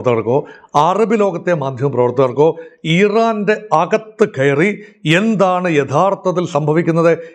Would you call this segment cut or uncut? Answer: uncut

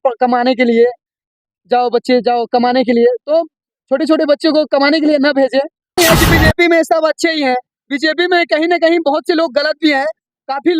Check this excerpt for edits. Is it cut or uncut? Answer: cut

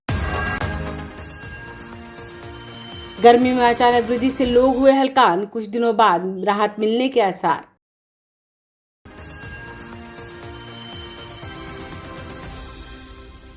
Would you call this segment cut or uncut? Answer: cut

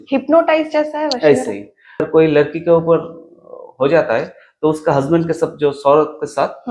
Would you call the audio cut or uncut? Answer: cut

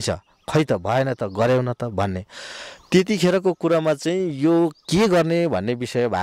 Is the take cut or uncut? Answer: uncut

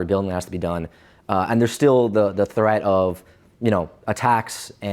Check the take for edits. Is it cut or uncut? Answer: uncut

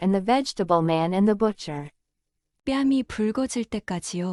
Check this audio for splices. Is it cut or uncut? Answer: uncut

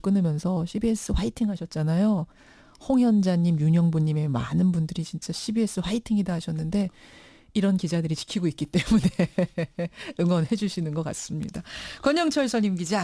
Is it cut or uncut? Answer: cut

